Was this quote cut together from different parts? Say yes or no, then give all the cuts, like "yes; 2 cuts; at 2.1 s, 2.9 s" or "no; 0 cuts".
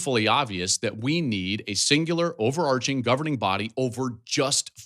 no; 0 cuts